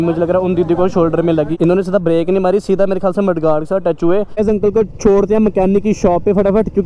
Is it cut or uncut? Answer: cut